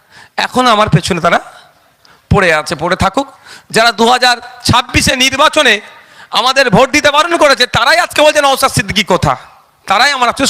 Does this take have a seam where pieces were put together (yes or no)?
no